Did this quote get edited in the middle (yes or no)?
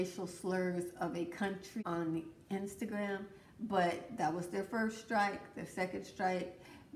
yes